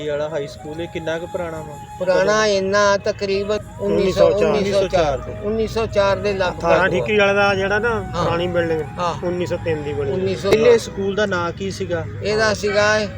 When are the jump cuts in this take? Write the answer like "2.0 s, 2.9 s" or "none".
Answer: 3.6 s, 10.5 s